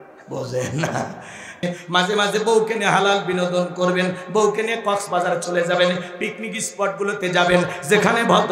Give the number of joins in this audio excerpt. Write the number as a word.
one